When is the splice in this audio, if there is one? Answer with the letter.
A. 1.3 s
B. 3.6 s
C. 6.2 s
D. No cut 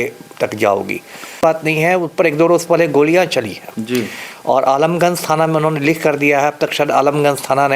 A